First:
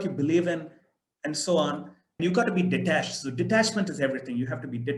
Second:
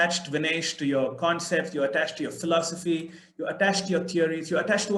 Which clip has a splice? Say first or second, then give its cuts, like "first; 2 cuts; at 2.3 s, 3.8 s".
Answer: first; 1 cut; at 2.0 s